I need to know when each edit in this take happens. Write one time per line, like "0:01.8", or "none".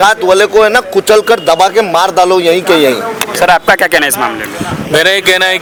none